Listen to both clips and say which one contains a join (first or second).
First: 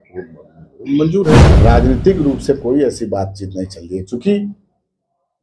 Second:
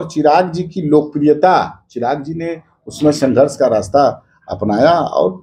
first